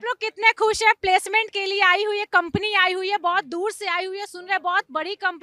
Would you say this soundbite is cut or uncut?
uncut